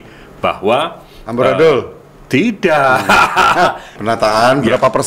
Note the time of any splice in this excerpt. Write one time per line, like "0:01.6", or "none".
0:03.9